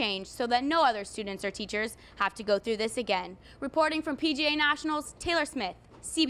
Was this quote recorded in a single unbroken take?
yes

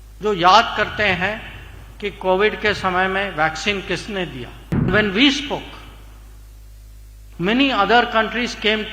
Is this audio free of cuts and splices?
no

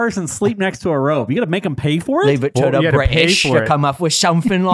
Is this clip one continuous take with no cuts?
yes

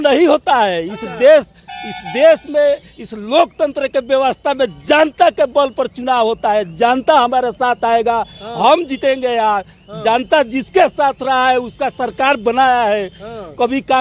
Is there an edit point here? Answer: no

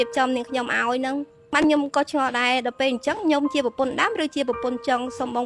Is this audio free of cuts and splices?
no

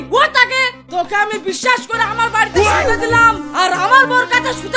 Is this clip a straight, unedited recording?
yes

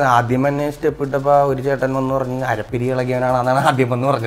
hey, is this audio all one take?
yes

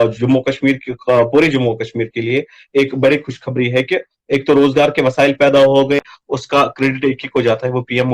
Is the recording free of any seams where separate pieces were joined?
no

